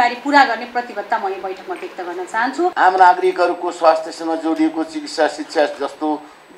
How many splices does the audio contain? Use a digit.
1